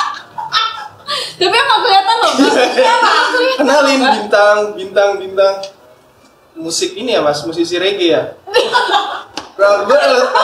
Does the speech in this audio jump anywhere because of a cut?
no; 0 cuts

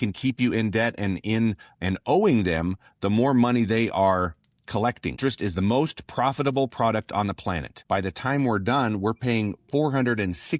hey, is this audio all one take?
no; 2 cuts; at 5.2 s, 7.7 s

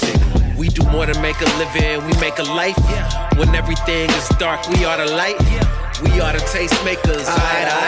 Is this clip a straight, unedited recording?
yes; 0 cuts

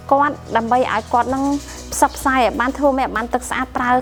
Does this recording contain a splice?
no; 0 cuts

